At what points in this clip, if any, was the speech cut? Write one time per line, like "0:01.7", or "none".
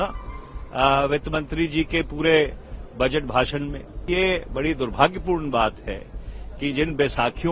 0:04.1

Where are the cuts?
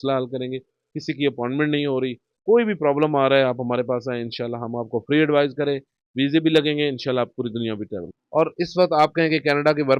0:08.1

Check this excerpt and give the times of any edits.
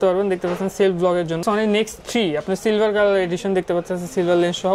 0:01.4

